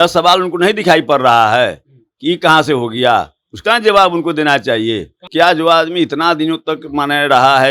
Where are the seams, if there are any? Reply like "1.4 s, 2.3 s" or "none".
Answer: 5.2 s